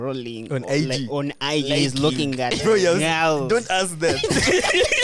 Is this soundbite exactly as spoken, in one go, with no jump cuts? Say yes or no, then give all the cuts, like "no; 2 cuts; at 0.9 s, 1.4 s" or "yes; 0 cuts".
yes; 0 cuts